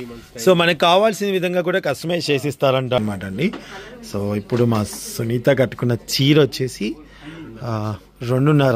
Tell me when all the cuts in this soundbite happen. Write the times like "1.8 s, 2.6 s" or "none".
3.0 s